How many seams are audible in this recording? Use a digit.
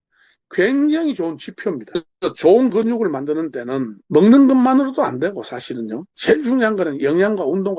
2